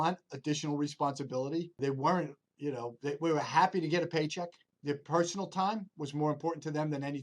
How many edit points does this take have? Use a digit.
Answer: 2